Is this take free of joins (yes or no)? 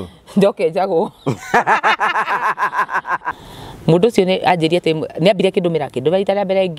no